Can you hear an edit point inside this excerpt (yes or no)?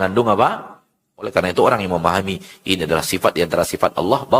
yes